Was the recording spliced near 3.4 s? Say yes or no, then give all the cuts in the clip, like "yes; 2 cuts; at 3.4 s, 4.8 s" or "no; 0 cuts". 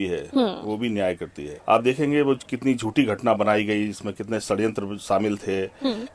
no; 1 cut; at 1.5 s